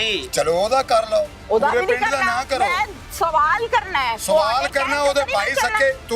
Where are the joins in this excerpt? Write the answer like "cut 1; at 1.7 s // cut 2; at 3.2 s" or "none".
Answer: none